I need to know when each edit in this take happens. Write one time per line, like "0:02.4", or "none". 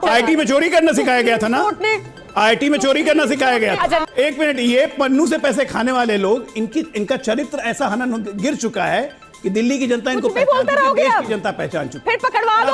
0:04.0